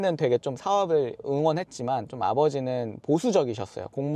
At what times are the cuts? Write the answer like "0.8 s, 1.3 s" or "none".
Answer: none